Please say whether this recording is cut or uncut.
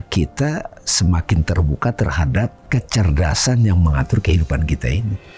cut